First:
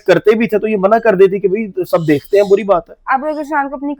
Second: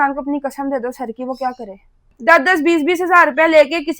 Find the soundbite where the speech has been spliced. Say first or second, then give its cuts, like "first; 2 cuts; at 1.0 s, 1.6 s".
second; 1 cut; at 2.1 s